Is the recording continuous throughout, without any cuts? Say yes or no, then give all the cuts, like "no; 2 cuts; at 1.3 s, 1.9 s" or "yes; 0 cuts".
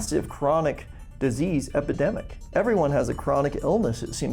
no; 1 cut; at 2.3 s